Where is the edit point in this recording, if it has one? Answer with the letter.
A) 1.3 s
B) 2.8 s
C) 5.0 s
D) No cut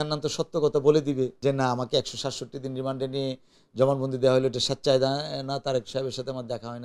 A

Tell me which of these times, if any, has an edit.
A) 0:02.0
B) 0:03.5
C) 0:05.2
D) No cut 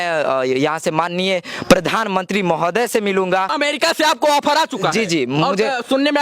B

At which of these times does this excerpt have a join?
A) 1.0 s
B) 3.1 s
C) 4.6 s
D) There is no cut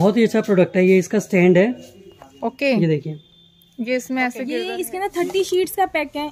C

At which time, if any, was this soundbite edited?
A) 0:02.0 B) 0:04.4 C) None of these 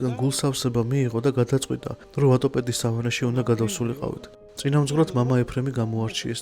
B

